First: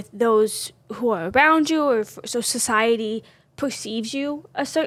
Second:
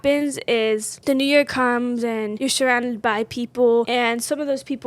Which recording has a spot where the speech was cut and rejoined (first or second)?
second